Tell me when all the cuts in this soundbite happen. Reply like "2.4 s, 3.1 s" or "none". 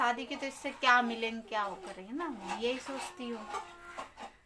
none